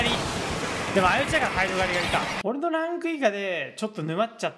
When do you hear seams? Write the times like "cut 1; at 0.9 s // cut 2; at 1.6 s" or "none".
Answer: cut 1; at 2.3 s